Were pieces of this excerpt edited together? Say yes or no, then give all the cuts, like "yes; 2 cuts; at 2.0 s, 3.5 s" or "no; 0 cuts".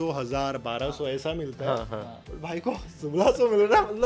no; 0 cuts